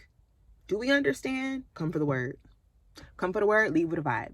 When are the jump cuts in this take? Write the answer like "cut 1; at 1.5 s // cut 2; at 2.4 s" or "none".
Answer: cut 1; at 1.8 s